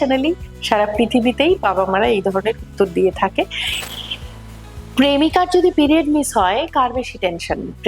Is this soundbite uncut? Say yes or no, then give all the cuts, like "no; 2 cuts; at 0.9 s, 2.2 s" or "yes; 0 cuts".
no; 1 cut; at 3.7 s